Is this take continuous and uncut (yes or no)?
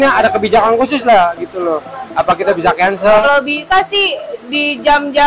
no